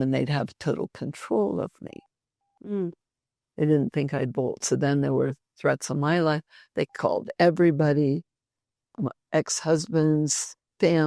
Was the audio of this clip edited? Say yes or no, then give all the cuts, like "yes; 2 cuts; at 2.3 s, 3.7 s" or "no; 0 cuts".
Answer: no; 0 cuts